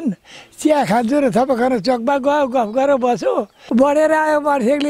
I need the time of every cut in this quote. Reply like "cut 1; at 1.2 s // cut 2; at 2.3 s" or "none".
cut 1; at 3.5 s